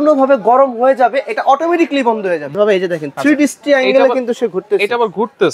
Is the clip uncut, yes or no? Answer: no